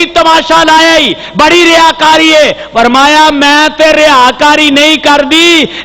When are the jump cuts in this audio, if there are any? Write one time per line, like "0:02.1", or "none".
none